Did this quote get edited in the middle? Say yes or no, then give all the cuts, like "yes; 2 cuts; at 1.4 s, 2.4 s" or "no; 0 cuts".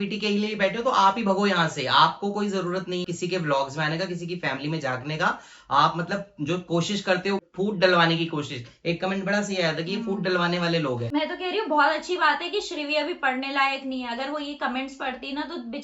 yes; 3 cuts; at 3.0 s, 7.4 s, 11.1 s